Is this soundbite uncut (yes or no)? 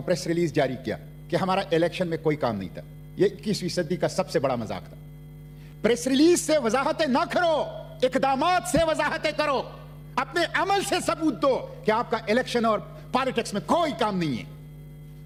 yes